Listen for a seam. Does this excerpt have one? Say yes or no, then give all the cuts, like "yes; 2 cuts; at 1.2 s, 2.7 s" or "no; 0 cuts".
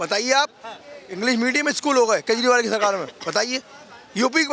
no; 0 cuts